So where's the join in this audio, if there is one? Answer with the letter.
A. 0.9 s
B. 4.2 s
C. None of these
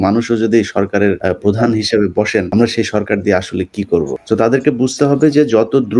B